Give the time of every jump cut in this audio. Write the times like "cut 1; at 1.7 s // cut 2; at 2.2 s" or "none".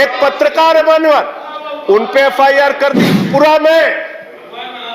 cut 1; at 3.3 s